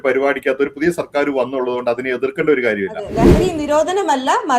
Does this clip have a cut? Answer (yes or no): yes